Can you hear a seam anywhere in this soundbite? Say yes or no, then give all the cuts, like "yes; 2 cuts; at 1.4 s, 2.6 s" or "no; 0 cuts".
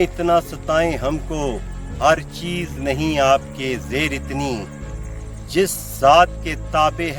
no; 0 cuts